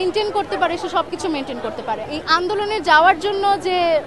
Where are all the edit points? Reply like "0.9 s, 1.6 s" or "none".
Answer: 2.1 s